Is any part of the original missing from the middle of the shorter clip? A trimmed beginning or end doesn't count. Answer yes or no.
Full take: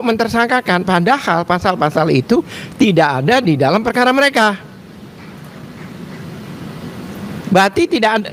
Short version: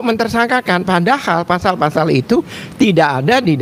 no